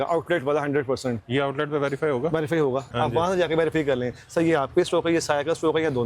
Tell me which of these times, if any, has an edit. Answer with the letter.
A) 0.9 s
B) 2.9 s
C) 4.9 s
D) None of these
B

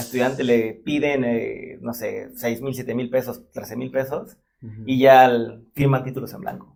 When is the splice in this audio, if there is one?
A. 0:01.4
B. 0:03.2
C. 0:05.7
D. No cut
D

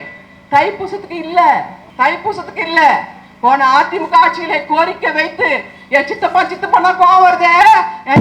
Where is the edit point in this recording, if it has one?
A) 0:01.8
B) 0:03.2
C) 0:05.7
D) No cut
A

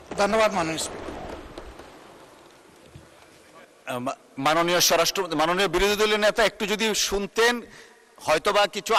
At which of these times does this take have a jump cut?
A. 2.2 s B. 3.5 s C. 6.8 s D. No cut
D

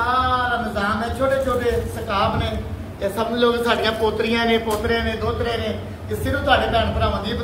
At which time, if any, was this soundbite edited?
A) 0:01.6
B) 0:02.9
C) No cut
C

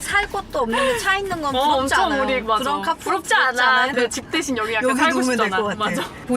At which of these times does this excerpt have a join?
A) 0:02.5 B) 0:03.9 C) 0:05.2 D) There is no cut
B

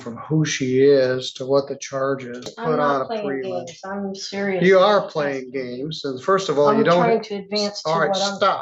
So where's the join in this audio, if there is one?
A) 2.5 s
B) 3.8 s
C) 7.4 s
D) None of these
A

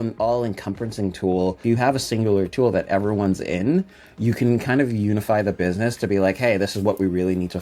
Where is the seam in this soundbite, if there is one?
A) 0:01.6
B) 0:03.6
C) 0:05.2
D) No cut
A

